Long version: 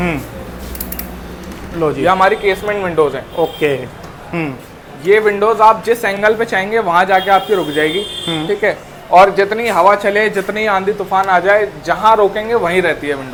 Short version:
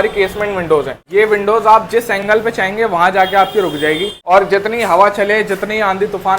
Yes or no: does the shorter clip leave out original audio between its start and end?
yes